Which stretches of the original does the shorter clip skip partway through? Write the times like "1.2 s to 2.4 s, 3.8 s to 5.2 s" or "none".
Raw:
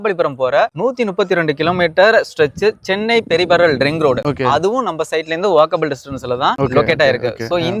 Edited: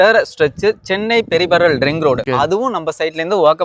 4.2 s to 4.4 s